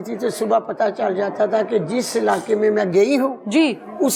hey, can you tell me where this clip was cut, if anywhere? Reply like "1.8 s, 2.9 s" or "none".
none